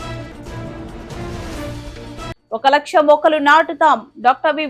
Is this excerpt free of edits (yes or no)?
yes